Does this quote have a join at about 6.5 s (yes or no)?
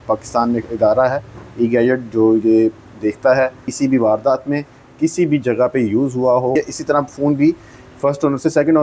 yes